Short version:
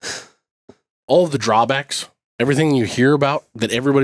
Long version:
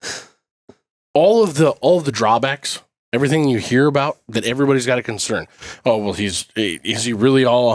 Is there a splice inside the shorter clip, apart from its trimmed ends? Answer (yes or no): yes